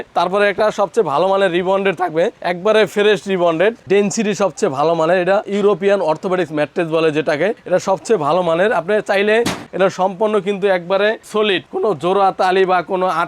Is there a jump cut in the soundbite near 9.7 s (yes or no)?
yes